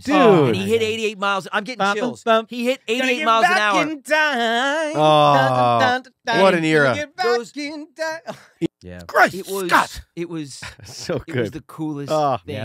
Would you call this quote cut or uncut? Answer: cut